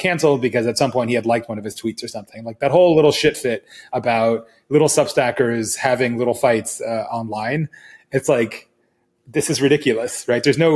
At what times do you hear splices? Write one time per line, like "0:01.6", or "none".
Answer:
none